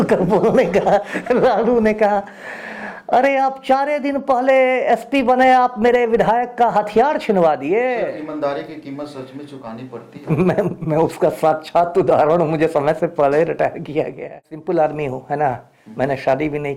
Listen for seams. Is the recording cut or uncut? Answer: cut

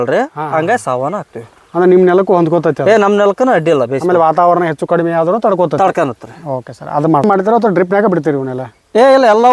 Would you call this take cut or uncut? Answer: cut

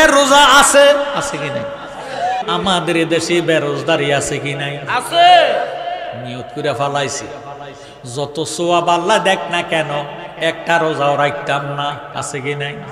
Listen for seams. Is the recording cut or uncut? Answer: cut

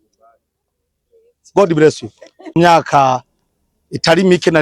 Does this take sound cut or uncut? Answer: cut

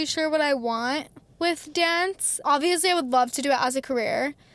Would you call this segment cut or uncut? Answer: cut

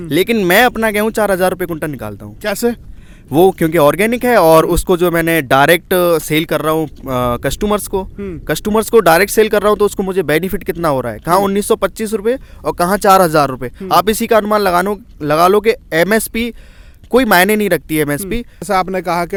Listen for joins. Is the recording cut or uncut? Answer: uncut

